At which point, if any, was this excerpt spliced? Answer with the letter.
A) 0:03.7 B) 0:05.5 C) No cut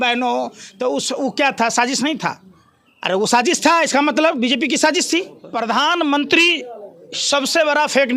B